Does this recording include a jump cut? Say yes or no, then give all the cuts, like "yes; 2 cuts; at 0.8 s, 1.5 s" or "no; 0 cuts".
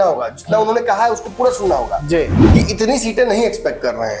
yes; 1 cut; at 2.4 s